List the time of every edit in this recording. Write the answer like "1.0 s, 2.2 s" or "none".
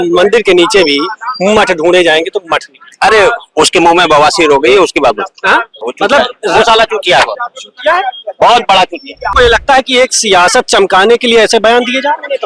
9.3 s